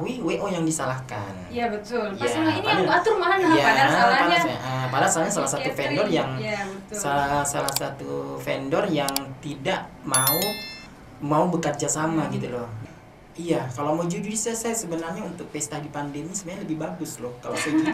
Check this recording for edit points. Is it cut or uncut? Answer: cut